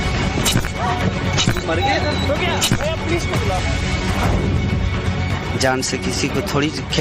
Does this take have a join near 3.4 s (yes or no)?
yes